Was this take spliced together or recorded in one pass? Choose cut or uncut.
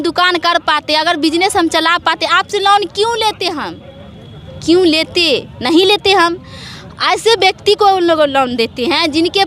uncut